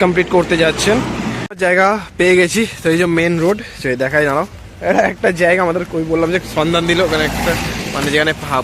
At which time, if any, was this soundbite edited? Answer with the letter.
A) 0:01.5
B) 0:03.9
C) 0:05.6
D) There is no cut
A